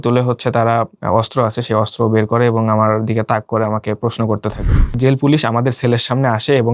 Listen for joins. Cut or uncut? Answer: cut